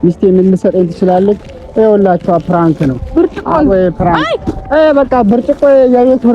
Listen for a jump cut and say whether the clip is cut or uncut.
cut